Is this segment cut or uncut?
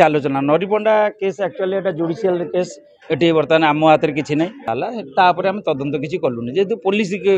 cut